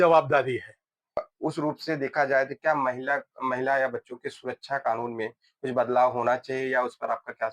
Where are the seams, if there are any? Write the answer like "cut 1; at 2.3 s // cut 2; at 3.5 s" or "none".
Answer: cut 1; at 1.3 s